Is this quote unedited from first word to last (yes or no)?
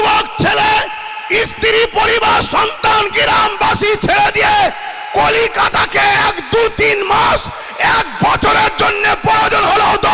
yes